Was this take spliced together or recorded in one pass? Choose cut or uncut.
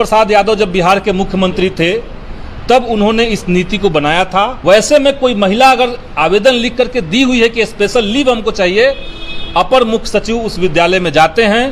cut